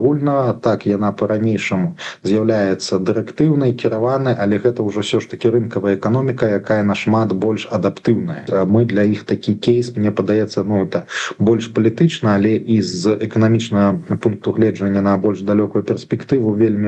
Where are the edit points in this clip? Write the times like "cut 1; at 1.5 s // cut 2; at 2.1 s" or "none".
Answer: cut 1; at 8.4 s